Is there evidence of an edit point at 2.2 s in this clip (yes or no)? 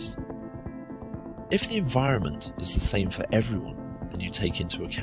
no